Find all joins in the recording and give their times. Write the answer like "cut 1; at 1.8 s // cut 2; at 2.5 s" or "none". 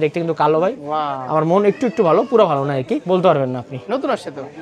cut 1; at 3.0 s